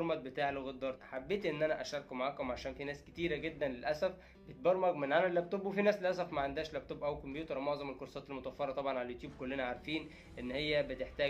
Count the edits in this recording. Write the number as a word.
one